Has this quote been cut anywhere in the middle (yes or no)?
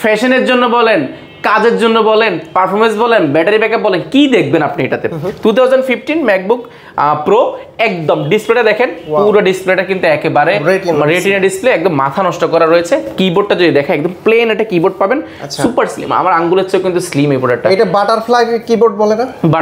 no